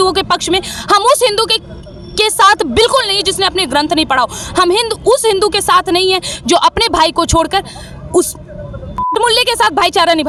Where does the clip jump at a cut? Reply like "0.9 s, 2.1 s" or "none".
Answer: none